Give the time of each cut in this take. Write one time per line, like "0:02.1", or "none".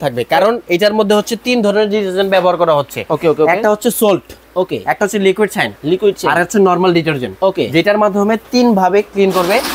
none